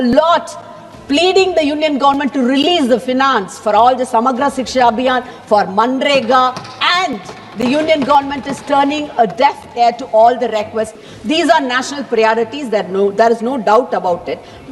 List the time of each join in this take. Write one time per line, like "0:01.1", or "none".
0:11.0